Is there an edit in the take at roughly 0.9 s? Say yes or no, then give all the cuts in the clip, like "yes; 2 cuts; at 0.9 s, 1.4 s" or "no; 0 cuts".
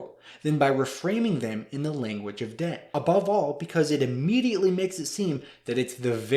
no; 1 cut; at 2.9 s